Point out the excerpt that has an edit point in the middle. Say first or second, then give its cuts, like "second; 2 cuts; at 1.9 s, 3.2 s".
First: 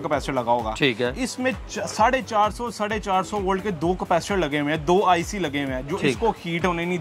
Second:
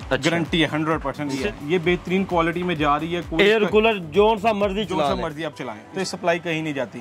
second; 2 cuts; at 1.4 s, 5.8 s